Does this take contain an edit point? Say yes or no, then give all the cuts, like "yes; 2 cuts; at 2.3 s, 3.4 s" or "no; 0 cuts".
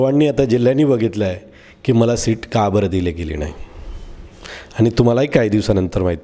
no; 0 cuts